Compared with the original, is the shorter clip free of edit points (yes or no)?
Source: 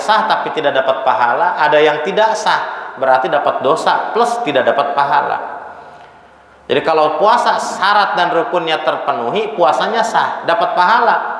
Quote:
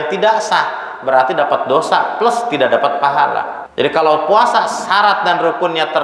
no